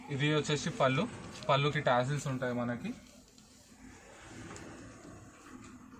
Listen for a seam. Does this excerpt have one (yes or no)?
no